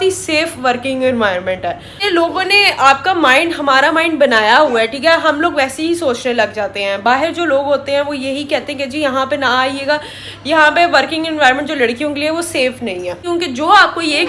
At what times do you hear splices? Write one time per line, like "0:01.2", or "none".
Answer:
0:02.0
0:13.2

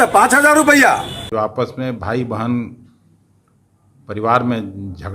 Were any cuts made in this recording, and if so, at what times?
0:01.2

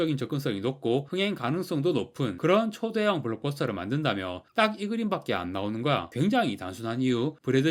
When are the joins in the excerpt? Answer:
none

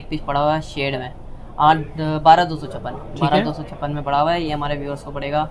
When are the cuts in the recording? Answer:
none

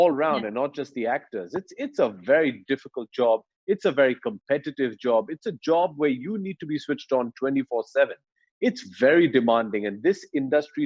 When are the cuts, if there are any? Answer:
none

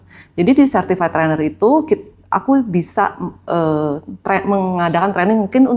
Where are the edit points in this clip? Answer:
none

